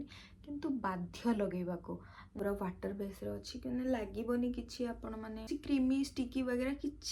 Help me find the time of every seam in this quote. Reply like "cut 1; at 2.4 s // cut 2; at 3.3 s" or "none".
cut 1; at 2.2 s // cut 2; at 5.5 s